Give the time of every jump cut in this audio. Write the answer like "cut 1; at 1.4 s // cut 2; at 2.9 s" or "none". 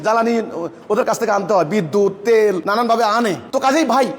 cut 1; at 2.6 s